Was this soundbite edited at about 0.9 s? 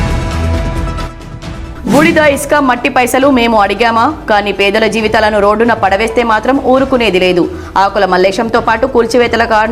yes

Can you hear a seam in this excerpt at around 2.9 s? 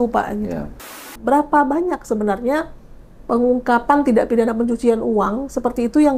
no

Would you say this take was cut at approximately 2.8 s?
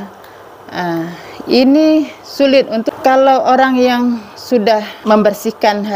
yes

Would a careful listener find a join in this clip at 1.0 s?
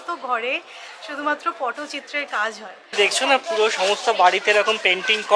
no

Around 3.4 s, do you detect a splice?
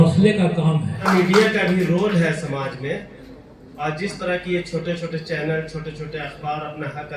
no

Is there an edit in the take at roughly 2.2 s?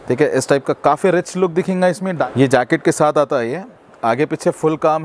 yes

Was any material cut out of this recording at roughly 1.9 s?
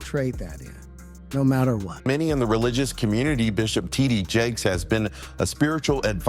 yes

